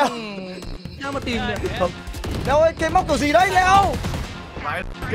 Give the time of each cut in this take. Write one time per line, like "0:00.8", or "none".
0:02.1